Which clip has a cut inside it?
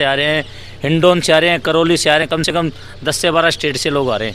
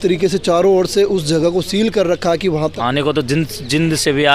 second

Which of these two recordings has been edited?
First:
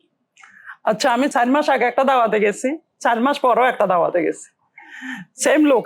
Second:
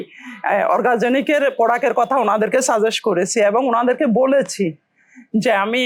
first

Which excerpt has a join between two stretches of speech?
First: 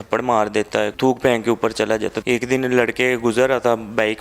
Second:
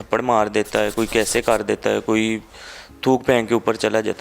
first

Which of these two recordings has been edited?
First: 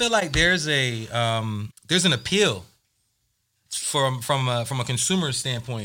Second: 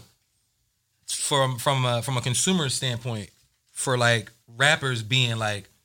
first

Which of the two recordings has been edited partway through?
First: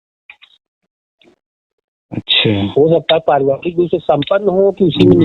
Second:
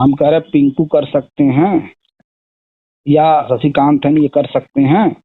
second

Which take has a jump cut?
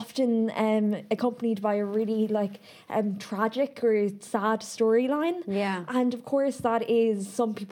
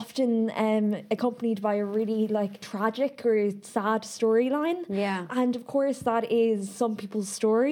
second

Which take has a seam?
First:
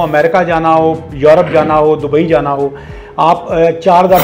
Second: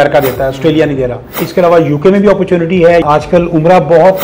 second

